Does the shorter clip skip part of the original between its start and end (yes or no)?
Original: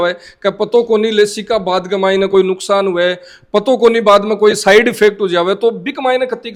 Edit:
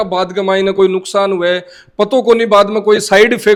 no